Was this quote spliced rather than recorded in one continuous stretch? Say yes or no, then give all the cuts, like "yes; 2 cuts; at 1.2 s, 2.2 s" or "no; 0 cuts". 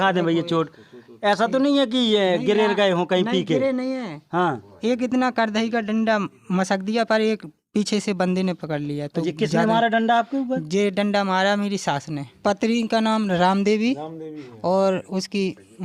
yes; 1 cut; at 12.2 s